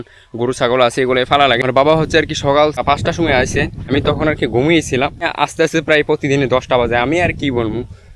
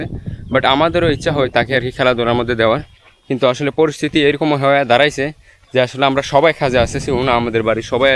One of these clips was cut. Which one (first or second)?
first